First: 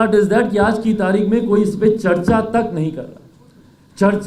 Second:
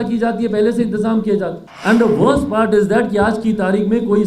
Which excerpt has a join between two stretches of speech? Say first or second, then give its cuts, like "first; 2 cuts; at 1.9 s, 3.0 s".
second; 1 cut; at 1.7 s